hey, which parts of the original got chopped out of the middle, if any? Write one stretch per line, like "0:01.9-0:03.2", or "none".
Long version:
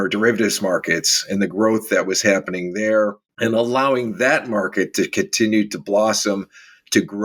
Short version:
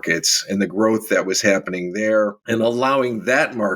0:03.2-0:03.3